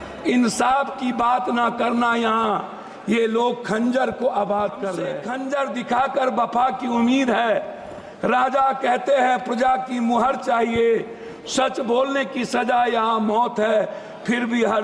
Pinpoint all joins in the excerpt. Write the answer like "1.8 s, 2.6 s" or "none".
5.2 s